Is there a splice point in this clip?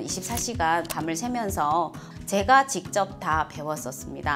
yes; 1 cut; at 2.0 s

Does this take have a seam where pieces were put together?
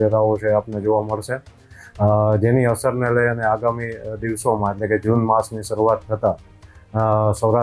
no; 0 cuts

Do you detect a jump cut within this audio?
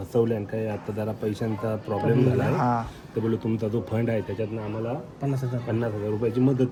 no; 0 cuts

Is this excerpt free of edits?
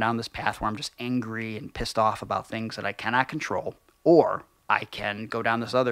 no; 1 cut; at 4.5 s

